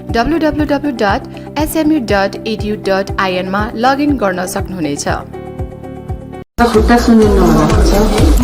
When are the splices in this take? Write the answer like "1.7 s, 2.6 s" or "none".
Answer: none